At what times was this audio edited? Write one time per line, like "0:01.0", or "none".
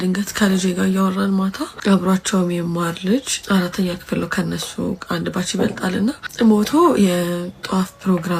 0:01.7
0:03.4
0:06.2